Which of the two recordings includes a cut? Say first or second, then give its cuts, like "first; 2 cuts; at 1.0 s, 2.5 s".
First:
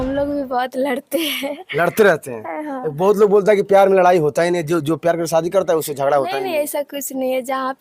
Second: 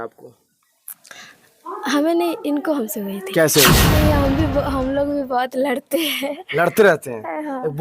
second; 1 cut; at 3.9 s